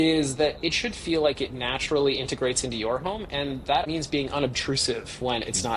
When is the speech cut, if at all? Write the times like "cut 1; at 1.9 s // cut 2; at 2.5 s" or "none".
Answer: cut 1; at 3.8 s